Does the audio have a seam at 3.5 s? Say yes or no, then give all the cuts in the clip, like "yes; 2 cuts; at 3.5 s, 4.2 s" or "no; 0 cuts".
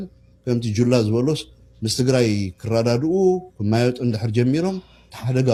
no; 0 cuts